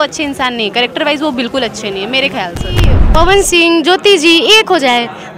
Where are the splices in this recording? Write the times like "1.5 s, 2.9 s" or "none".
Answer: 3.0 s